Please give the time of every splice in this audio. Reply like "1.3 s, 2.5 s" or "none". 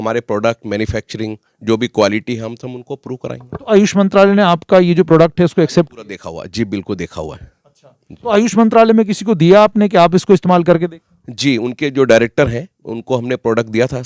none